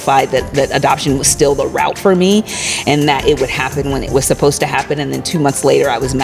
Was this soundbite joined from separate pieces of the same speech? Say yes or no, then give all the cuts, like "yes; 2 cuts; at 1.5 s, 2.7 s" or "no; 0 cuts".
no; 0 cuts